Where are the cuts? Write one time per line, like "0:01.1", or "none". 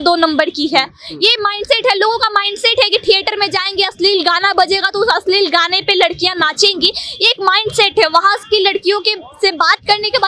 none